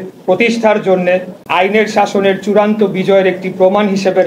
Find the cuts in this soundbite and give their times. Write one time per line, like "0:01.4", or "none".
0:01.4

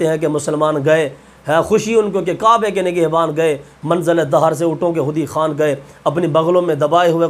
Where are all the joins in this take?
none

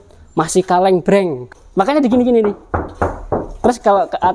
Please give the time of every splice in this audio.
0:01.4

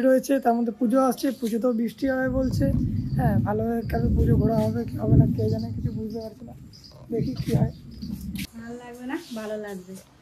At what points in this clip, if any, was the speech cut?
0:08.5

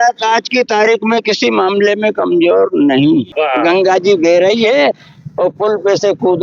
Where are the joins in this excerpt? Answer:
0:03.3

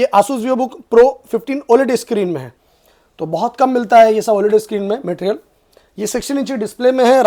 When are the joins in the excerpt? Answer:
none

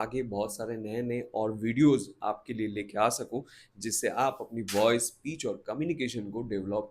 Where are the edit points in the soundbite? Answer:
none

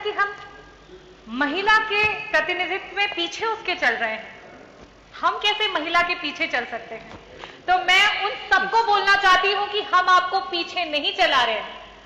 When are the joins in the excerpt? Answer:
none

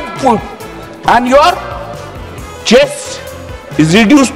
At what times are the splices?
none

